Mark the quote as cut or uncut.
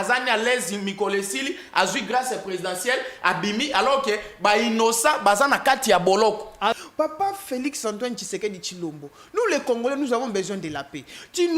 cut